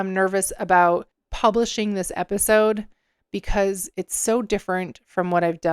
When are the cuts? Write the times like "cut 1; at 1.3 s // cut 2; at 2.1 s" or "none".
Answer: cut 1; at 1.2 s